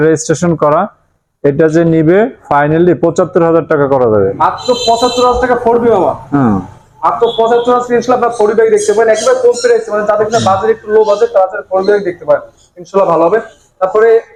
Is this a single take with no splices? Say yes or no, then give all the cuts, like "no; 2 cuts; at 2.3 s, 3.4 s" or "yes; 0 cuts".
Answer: yes; 0 cuts